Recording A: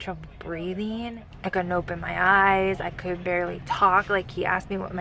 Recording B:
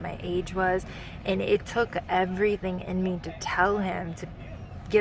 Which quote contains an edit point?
A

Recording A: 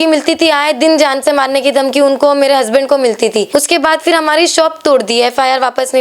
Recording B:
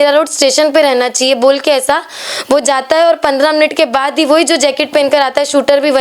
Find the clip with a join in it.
A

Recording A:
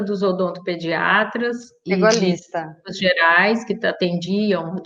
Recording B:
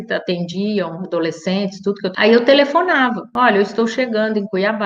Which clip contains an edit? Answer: B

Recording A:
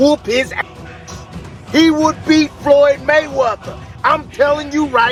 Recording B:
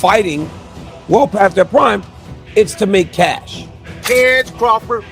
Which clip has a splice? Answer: B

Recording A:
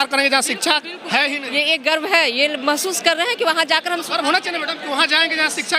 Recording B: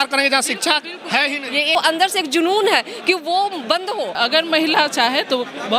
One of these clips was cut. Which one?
B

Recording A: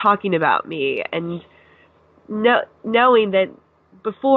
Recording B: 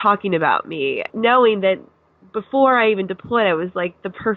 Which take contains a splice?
B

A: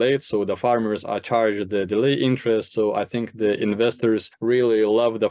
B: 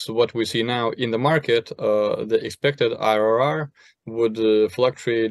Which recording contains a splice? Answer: A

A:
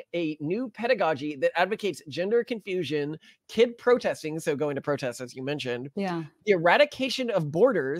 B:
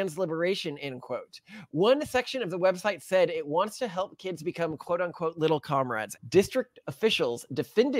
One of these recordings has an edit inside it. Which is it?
B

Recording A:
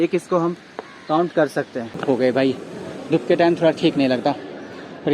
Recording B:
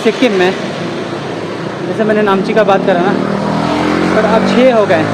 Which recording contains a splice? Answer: A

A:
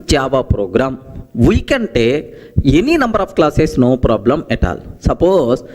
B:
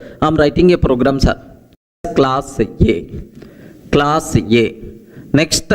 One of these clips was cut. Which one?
B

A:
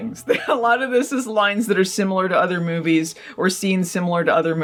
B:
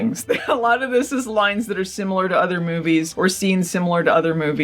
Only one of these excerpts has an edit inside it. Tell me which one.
B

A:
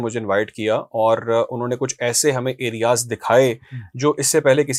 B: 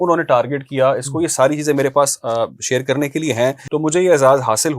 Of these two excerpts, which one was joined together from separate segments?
B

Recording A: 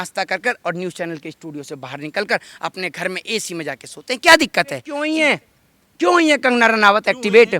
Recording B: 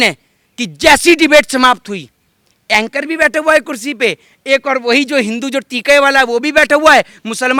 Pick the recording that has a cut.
A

